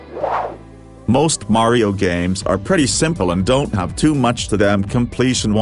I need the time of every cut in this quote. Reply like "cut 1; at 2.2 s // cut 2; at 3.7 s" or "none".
cut 1; at 0.9 s